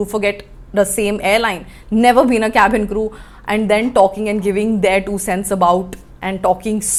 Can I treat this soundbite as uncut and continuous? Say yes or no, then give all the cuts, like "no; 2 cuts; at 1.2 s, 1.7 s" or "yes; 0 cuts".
yes; 0 cuts